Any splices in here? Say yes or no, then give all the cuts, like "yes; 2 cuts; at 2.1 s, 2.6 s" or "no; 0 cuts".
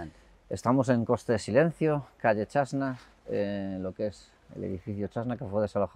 no; 0 cuts